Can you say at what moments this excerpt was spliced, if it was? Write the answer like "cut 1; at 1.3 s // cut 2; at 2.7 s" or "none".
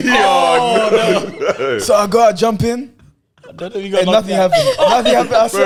none